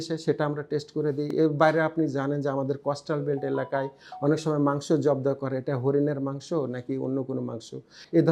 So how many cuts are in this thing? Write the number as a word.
zero